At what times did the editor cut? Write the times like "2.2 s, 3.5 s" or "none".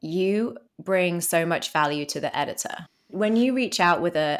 2.9 s